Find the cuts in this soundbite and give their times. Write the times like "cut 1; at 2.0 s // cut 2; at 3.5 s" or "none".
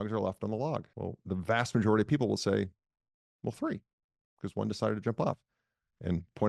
cut 1; at 0.9 s